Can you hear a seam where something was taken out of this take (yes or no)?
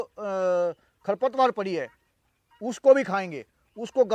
no